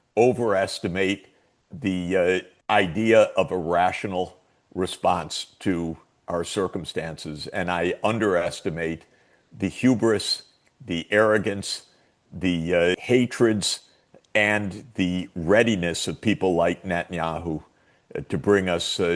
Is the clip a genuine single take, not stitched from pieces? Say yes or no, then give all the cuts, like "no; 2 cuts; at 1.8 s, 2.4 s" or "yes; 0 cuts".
no; 2 cuts; at 2.5 s, 13.0 s